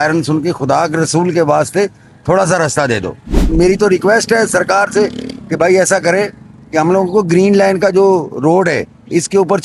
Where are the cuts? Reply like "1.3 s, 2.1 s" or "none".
3.4 s